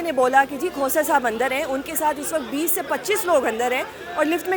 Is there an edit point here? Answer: no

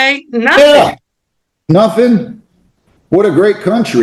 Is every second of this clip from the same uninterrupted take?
yes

